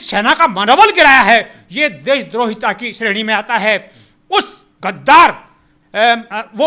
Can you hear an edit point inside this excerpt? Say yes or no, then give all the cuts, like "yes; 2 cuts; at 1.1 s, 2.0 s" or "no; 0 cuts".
no; 0 cuts